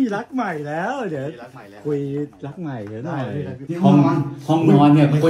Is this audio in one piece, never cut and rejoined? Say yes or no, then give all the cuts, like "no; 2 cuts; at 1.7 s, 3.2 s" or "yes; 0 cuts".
no; 1 cut; at 3.6 s